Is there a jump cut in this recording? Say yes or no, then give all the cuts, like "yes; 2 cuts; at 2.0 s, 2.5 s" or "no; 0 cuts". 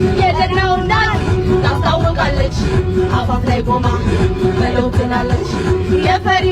no; 0 cuts